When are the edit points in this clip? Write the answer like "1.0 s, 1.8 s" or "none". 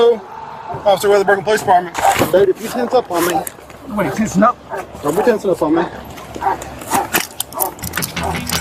1.9 s